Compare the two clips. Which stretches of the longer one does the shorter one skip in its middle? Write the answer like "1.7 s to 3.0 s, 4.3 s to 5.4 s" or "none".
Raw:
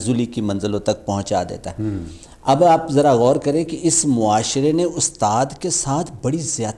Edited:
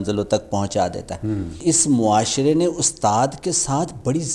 2.1 s to 3.7 s